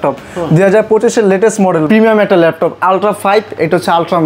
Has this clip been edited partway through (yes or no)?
yes